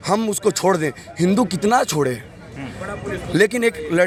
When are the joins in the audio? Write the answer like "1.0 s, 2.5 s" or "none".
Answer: none

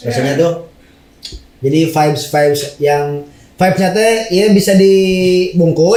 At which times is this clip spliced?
none

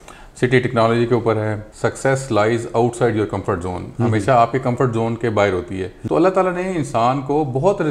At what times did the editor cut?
1.6 s, 5.9 s

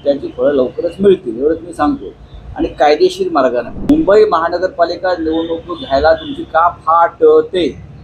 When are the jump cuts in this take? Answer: 3.8 s

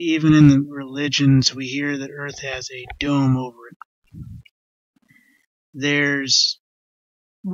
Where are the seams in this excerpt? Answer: 1.2 s

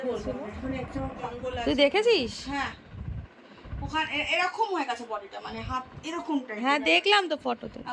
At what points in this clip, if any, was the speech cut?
1.3 s

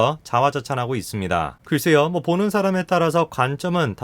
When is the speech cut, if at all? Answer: 1.6 s

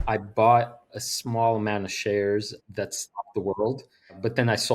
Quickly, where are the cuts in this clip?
1.0 s, 2.6 s

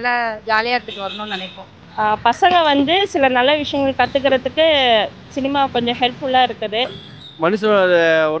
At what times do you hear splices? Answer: 7.1 s

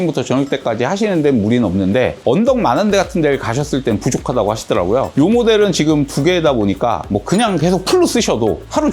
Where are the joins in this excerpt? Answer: 5.1 s

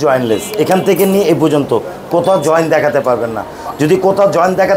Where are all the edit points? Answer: none

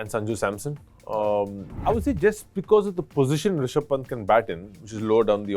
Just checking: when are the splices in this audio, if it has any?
1.7 s

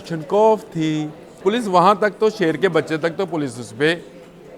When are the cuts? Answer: 1.4 s

